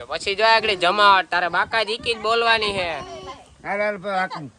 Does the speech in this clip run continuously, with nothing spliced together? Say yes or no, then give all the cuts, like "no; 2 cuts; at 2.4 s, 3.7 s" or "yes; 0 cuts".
yes; 0 cuts